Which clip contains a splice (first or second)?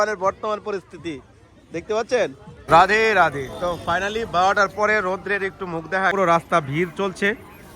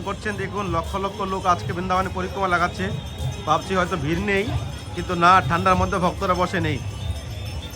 first